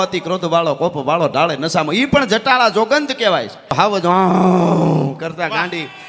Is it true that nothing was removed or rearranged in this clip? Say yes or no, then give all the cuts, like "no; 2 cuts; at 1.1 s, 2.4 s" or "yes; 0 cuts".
no; 1 cut; at 3.7 s